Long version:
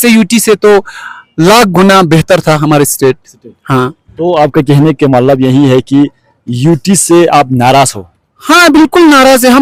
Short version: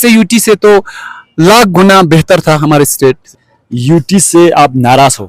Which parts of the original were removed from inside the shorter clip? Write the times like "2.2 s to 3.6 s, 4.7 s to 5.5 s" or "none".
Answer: 3.5 s to 6.3 s